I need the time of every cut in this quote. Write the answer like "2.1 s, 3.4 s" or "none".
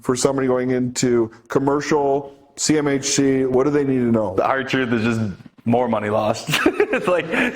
3.5 s, 4.3 s